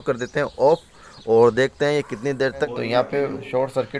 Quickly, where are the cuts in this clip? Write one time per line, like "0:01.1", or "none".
0:02.7